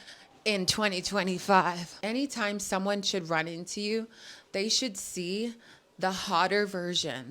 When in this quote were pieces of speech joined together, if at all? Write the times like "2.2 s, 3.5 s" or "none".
1.9 s